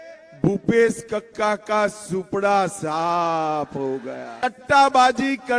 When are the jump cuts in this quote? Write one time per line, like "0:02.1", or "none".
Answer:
0:04.4